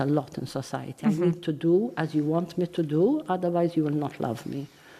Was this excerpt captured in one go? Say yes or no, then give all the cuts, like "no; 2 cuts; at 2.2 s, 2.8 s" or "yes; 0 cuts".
yes; 0 cuts